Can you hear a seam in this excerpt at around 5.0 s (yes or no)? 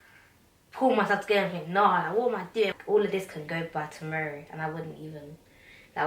no